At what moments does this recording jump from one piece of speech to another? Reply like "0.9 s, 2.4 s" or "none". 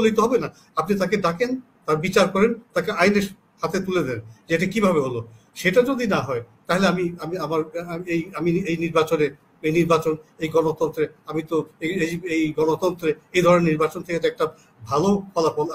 none